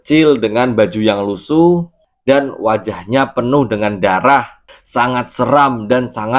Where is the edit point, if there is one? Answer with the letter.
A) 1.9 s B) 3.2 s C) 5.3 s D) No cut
D